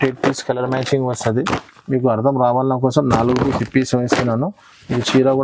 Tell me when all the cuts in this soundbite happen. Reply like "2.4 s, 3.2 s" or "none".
none